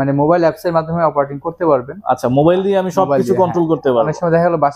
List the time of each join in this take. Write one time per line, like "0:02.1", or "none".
none